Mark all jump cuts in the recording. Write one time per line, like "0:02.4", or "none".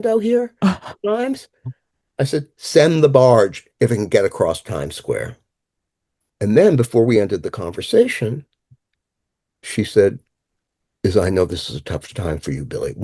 none